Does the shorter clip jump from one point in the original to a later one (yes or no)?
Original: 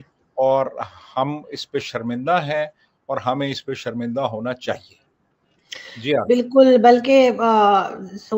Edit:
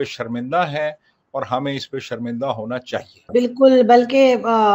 yes